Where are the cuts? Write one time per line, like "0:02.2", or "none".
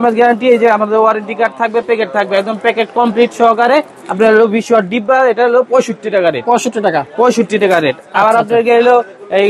none